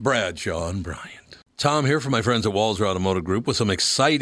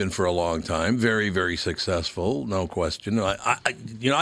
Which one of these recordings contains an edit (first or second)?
first